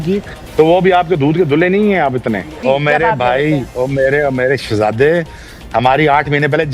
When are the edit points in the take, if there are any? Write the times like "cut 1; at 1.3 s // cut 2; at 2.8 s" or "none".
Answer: cut 1; at 2.6 s